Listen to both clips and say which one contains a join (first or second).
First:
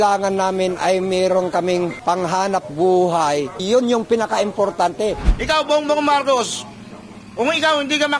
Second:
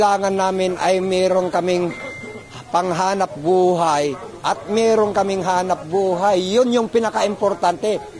first